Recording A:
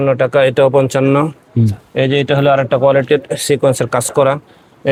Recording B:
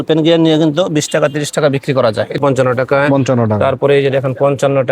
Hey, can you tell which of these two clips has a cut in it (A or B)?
B